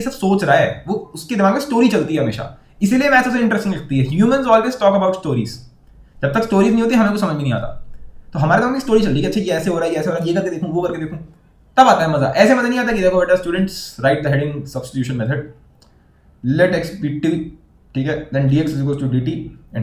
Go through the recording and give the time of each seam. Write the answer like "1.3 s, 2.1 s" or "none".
none